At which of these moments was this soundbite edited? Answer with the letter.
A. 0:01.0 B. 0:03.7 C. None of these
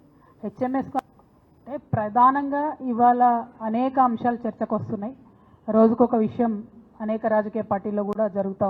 A